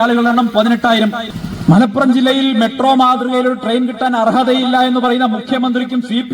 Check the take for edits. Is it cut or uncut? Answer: cut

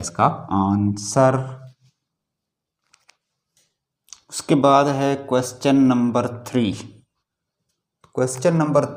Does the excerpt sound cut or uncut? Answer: uncut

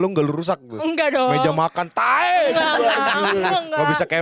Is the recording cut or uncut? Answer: uncut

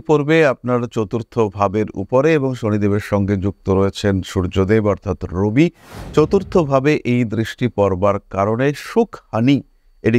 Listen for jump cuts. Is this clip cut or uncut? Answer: uncut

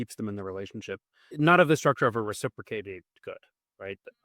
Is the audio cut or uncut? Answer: cut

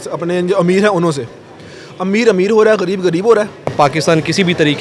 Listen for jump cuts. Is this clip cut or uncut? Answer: cut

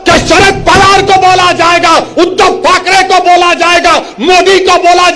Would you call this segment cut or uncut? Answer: uncut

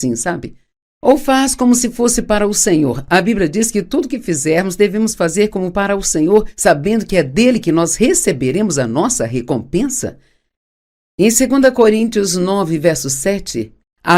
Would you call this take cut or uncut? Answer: cut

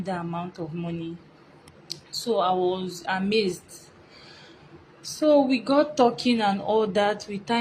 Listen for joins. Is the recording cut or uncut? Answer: uncut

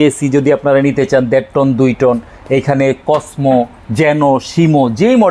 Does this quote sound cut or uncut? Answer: uncut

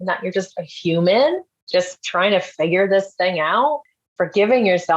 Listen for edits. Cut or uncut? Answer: cut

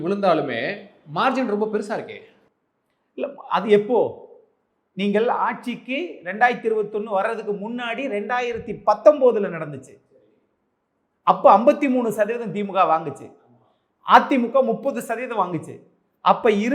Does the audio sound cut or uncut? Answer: uncut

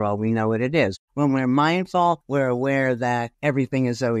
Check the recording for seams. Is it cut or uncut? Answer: cut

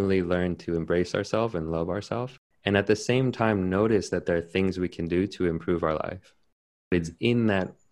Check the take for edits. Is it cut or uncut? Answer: cut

